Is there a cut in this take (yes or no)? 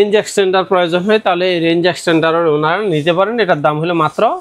no